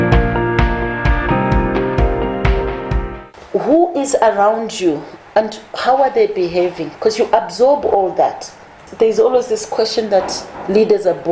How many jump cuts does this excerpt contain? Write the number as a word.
one